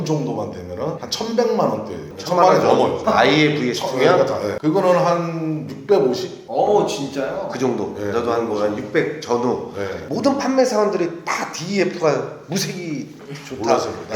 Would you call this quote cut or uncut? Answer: cut